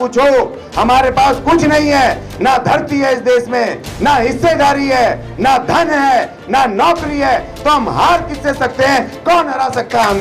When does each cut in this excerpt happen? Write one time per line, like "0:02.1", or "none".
none